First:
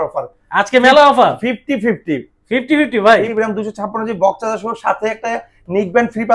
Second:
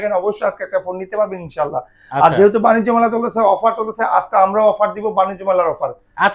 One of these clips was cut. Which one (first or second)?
first